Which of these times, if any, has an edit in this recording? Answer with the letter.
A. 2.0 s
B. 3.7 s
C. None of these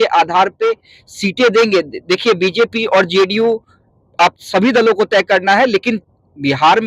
C